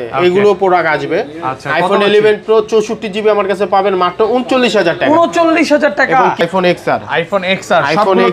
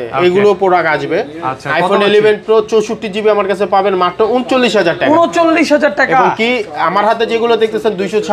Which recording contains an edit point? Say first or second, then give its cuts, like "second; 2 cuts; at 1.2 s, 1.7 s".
first; 1 cut; at 6.4 s